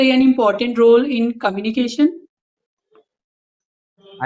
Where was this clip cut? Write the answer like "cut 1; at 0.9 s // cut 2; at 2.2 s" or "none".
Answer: none